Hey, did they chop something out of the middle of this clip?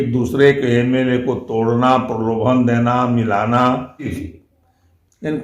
yes; 1 cut; at 4.2 s

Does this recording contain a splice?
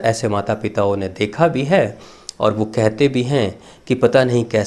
no; 0 cuts

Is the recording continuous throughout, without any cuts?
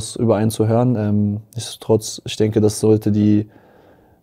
yes; 0 cuts

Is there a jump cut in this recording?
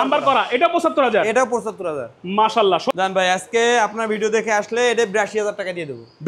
yes; 1 cut; at 2.9 s

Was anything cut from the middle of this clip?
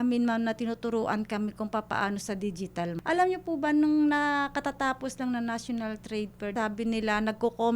yes; 2 cuts; at 2.9 s, 6.5 s

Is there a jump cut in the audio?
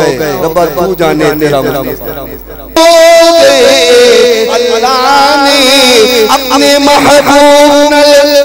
yes; 1 cut; at 2.8 s

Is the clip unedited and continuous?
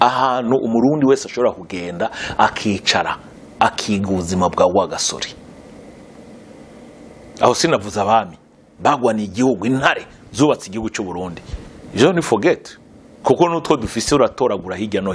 yes; 0 cuts

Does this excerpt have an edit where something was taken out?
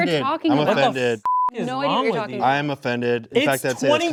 no; 0 cuts

